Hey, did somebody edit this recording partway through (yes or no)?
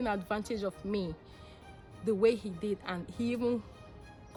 no